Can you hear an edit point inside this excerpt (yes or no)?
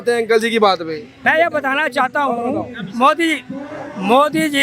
yes